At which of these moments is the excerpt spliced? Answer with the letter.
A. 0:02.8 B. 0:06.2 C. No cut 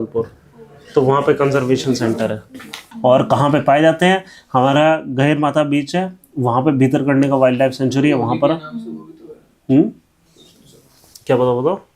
A